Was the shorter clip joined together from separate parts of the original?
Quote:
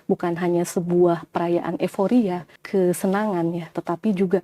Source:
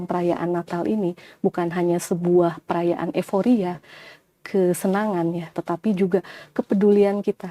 yes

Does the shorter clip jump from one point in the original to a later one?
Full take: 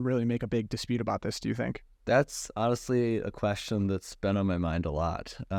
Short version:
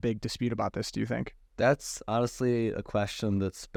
no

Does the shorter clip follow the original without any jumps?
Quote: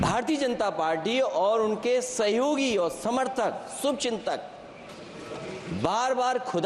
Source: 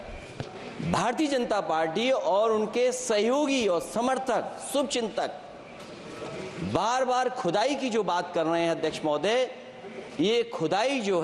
yes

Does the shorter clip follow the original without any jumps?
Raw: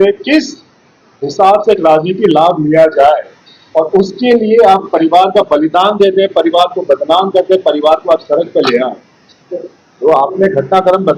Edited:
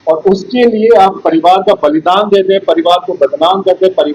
yes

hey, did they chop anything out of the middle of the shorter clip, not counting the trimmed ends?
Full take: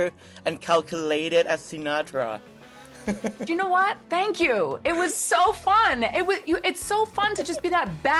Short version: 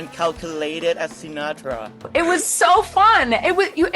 yes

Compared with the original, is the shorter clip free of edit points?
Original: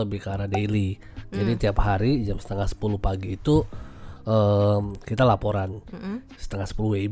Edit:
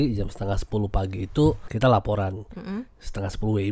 no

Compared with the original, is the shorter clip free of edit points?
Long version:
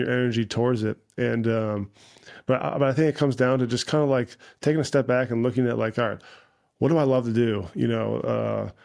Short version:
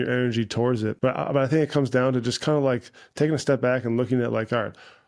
no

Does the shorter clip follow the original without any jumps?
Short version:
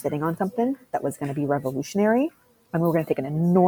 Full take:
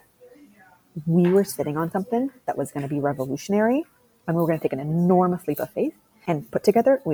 yes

